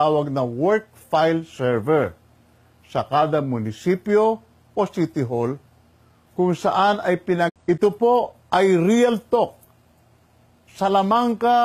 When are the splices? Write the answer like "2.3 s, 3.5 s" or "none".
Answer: none

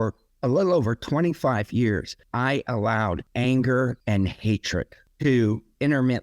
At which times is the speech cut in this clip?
2.2 s, 3.3 s, 4.0 s, 5.0 s

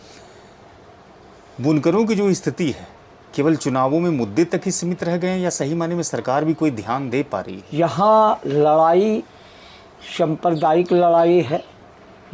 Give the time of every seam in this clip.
7.6 s

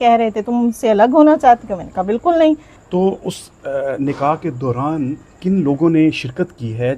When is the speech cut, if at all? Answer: 2.7 s

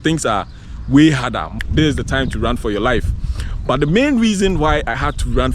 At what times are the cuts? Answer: 1.5 s

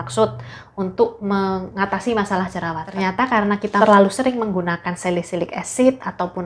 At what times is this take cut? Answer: 3.8 s

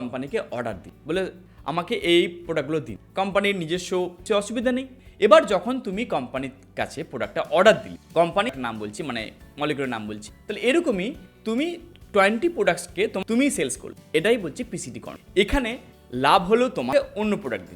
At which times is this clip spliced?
4.2 s, 8.6 s, 13.2 s, 16.9 s

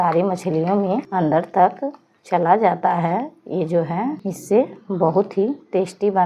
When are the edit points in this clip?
1.1 s, 4.3 s

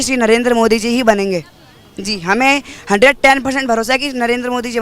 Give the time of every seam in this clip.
none

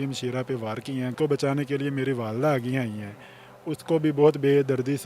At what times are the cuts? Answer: 1.1 s, 3.5 s

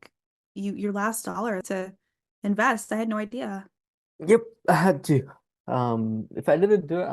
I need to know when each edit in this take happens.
1.6 s

